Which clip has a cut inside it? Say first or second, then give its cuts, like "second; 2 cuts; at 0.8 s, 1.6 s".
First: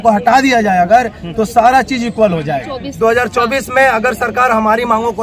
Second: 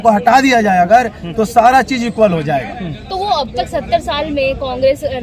first; 1 cut; at 2.9 s